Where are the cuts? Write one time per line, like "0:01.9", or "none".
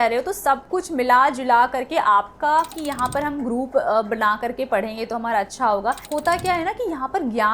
0:02.8
0:06.0

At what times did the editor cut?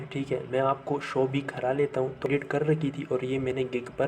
0:02.3

